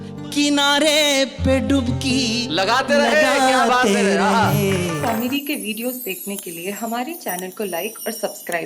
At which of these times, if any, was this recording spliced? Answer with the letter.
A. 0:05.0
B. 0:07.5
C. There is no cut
A